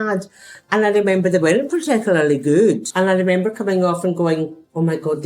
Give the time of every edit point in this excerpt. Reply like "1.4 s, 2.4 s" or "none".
2.9 s